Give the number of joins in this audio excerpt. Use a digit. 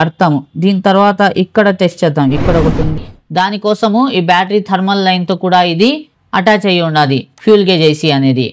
1